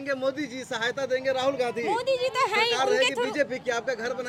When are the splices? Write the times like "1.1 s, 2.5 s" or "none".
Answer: none